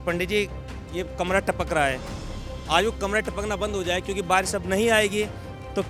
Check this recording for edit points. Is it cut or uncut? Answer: uncut